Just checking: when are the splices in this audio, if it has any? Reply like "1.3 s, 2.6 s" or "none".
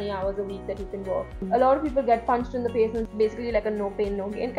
1.4 s, 3.0 s